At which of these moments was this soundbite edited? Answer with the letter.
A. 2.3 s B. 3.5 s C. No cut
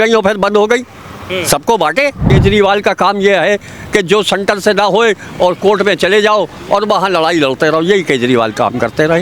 A